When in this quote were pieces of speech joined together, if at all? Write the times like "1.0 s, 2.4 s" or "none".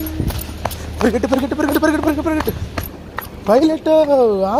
none